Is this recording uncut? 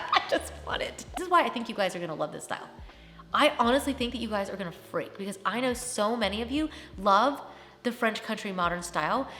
no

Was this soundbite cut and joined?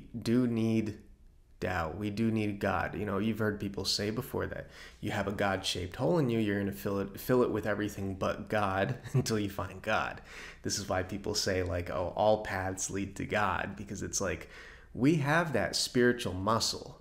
no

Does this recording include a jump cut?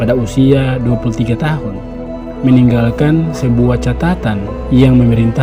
no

